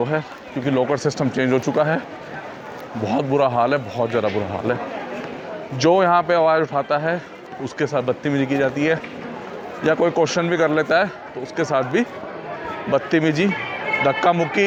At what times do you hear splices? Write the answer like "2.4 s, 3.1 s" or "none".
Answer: none